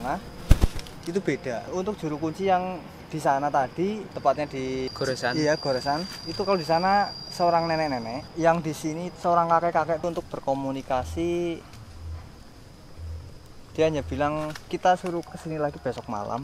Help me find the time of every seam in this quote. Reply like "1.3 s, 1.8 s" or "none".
10.0 s